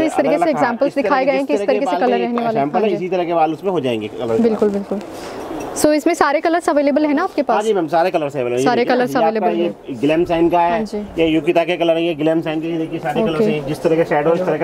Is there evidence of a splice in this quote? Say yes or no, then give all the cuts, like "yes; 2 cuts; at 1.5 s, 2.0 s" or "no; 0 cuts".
no; 0 cuts